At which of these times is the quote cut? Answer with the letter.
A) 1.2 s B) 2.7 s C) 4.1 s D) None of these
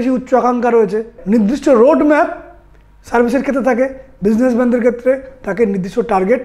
A